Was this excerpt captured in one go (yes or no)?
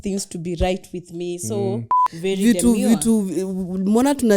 no